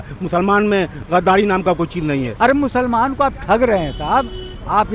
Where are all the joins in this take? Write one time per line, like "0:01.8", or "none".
0:02.3